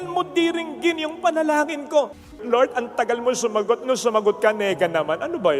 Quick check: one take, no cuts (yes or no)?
no